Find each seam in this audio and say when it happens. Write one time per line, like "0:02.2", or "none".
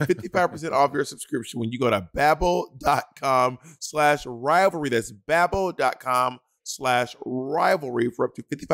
none